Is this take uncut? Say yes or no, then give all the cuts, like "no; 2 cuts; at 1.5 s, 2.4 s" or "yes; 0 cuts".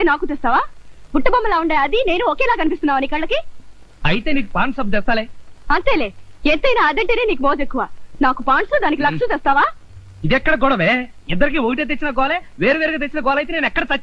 yes; 0 cuts